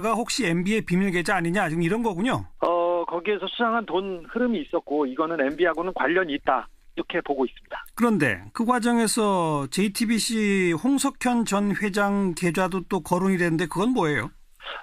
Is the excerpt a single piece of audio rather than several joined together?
no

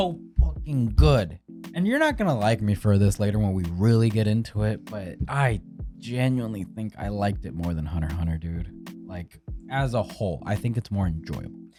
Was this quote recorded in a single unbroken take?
yes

